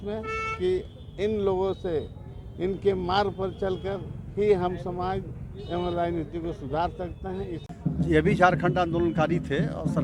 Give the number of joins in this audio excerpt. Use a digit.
1